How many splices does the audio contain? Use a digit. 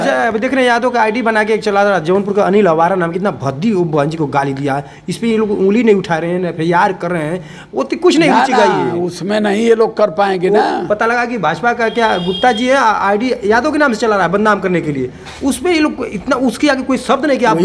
0